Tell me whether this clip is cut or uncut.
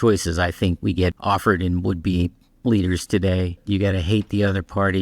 cut